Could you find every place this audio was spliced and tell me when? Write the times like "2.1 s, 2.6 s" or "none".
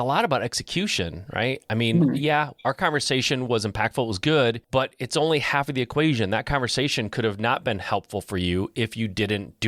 4.6 s